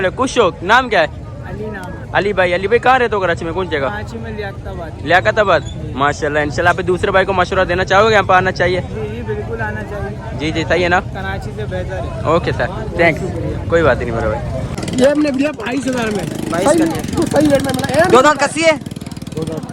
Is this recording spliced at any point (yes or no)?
yes